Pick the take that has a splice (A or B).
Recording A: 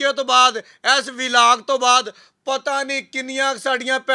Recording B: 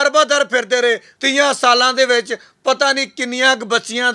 B